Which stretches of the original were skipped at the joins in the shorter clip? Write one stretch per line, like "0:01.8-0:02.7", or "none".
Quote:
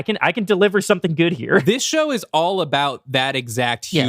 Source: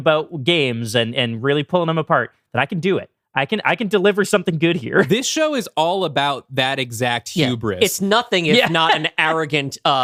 none